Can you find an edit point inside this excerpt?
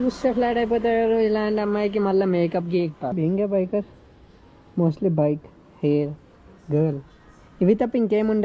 no; 0 cuts

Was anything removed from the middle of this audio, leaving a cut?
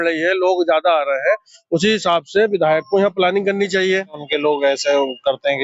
yes; 1 cut; at 4.2 s

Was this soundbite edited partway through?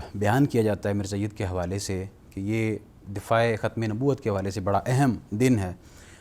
no; 0 cuts

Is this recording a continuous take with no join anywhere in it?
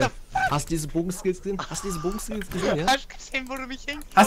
yes; 0 cuts

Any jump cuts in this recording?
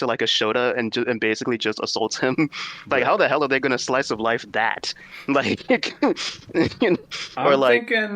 no; 0 cuts

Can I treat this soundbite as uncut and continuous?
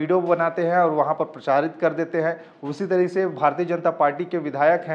yes; 0 cuts

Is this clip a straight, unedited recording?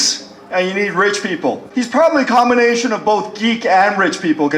yes; 0 cuts

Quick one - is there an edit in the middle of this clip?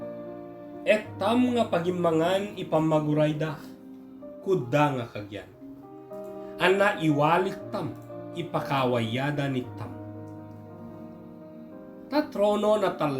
no; 0 cuts

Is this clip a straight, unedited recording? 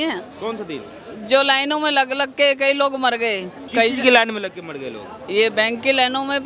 no; 1 cut; at 3.5 s

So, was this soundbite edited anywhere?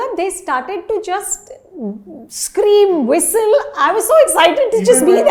no; 0 cuts

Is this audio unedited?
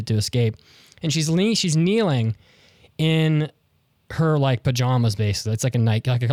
yes; 0 cuts

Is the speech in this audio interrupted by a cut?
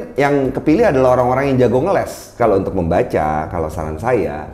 yes; 1 cut; at 2.4 s

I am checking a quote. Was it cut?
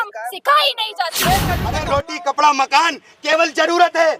yes; 1 cut; at 1.7 s

